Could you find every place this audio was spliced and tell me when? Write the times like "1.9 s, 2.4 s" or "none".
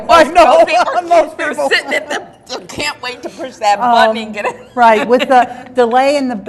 none